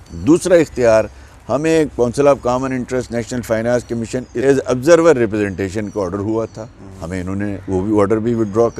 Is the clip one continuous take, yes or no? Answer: no